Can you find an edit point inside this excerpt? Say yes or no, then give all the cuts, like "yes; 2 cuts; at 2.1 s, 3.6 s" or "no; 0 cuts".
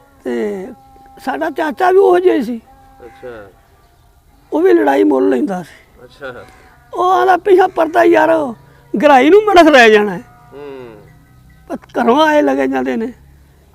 no; 0 cuts